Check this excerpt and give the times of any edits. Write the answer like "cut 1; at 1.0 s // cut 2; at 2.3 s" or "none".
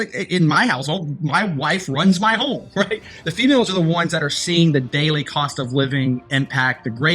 cut 1; at 3.1 s